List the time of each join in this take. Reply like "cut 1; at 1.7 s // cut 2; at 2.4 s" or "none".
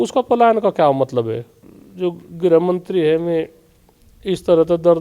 cut 1; at 1.5 s